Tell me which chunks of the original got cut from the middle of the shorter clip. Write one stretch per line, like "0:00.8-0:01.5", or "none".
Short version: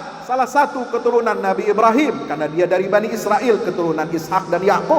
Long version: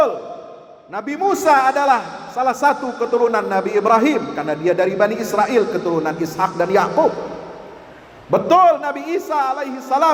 none